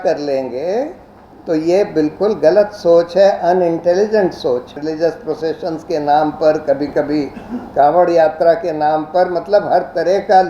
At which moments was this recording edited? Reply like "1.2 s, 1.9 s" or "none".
4.8 s